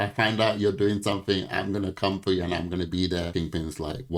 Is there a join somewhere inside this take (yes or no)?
no